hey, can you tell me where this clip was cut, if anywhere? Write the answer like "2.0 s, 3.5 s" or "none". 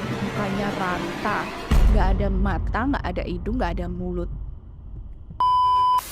5.2 s